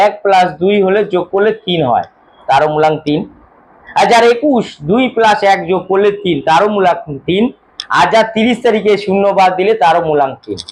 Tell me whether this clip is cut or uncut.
uncut